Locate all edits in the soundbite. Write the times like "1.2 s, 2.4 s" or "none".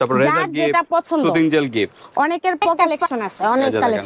3.0 s